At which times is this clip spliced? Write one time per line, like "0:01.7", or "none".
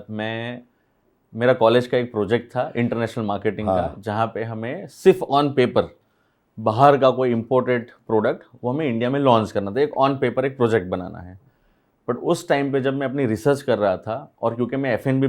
none